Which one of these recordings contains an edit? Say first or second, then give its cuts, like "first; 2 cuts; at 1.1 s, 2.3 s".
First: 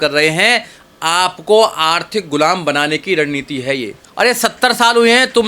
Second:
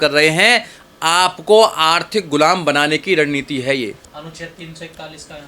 first; 1 cut; at 4.0 s